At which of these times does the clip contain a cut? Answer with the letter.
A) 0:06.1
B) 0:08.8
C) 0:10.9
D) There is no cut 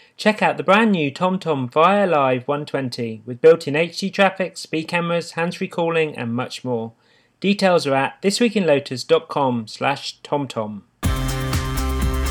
C